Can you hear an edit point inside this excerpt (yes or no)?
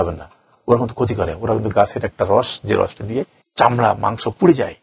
yes